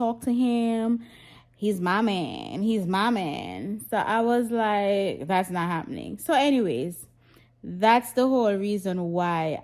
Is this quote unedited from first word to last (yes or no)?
yes